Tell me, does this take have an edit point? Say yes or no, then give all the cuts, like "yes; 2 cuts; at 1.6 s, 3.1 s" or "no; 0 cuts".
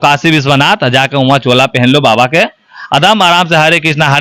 no; 0 cuts